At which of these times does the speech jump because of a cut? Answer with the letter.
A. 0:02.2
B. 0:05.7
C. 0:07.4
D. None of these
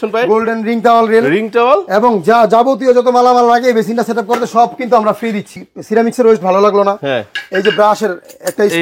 B